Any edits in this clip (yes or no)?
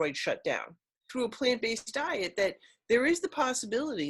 yes